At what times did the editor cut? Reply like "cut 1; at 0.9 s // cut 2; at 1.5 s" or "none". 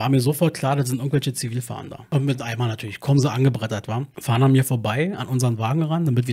cut 1; at 2.1 s // cut 2; at 4.1 s